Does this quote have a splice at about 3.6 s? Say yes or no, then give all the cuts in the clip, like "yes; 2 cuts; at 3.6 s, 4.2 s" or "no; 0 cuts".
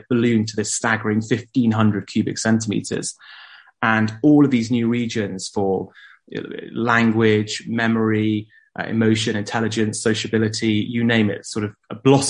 no; 0 cuts